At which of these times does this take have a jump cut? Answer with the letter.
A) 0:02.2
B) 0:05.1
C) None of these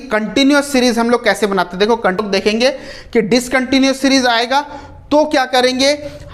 A